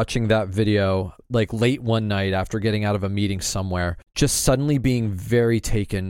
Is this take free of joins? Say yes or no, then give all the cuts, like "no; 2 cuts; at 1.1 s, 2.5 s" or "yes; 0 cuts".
no; 2 cuts; at 1.1 s, 4.0 s